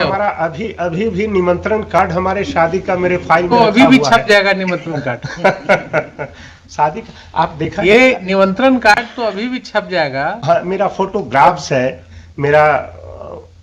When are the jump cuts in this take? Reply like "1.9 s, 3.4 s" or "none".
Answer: none